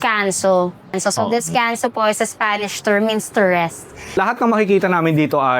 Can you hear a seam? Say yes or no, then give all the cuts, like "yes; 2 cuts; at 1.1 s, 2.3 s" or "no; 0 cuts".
yes; 2 cuts; at 0.9 s, 4.2 s